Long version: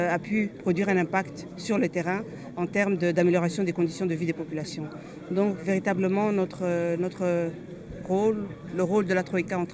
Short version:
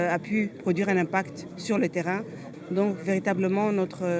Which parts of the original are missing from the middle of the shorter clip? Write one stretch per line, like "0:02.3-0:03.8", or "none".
0:02.4-0:05.0